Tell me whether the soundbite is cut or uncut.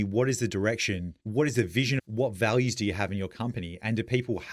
cut